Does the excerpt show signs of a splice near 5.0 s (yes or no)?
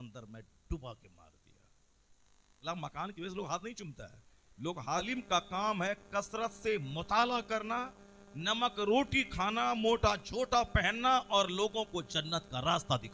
yes